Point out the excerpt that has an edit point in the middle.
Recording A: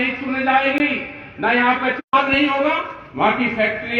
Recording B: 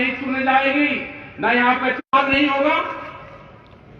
A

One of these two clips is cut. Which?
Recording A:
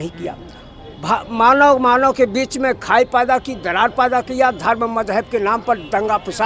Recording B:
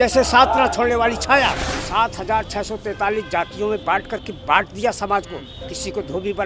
B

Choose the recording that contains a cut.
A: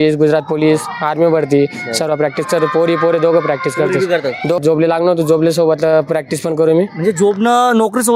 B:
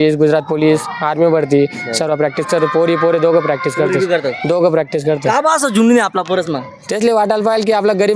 A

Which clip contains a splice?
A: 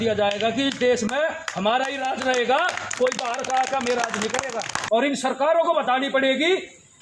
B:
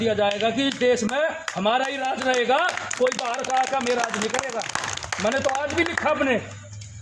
A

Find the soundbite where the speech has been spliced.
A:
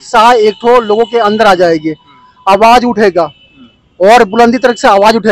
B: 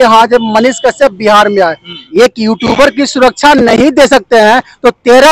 B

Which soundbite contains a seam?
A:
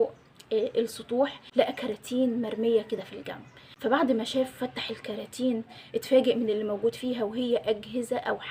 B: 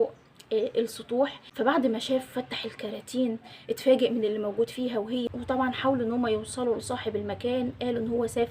B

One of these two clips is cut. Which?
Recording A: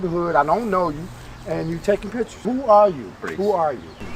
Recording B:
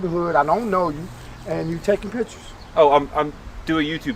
A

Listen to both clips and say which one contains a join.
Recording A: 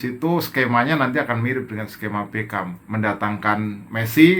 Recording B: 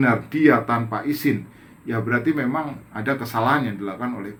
A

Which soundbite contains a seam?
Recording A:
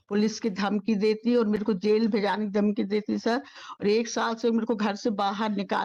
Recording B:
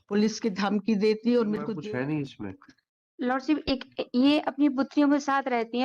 B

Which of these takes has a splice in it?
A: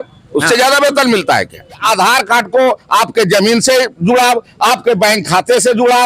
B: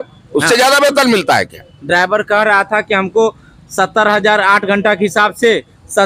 A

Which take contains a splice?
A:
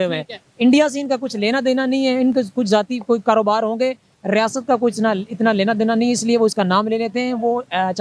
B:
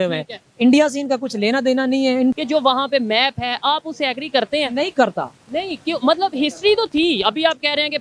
B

